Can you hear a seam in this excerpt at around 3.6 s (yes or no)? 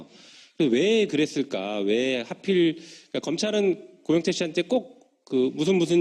yes